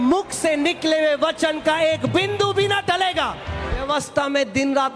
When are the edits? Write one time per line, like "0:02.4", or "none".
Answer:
0:03.8